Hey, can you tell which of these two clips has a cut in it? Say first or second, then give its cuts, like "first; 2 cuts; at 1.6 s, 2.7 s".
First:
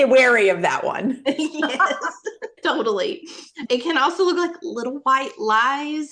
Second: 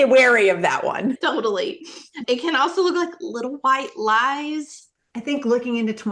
second; 2 cuts; at 1.2 s, 4.8 s